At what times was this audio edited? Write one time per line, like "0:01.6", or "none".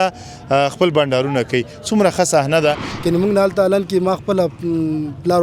0:02.9